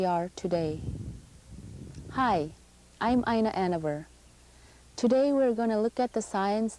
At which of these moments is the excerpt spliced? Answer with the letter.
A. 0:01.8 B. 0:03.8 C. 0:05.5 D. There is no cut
B